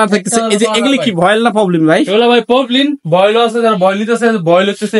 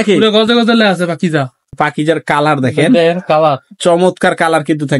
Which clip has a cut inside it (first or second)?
second